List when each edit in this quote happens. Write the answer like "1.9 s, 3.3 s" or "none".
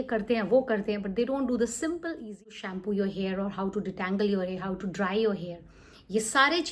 2.5 s